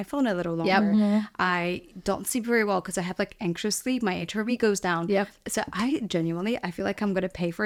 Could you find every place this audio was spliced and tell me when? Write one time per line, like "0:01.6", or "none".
none